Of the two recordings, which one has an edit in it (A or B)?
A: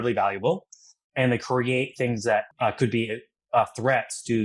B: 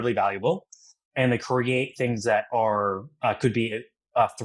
A